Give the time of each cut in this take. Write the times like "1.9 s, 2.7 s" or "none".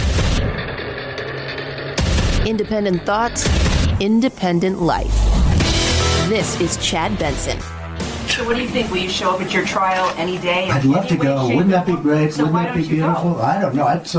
8.3 s